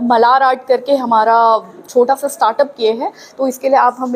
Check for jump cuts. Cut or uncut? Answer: cut